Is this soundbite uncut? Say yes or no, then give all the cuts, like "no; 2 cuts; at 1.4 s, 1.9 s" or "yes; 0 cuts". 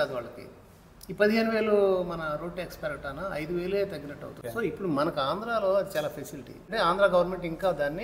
no; 2 cuts; at 4.4 s, 6.7 s